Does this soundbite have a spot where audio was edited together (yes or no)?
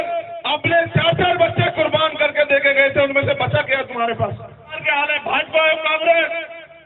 yes